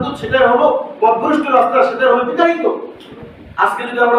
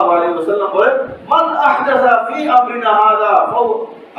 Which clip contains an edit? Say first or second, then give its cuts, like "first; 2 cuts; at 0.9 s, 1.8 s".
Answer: first; 1 cut; at 3.2 s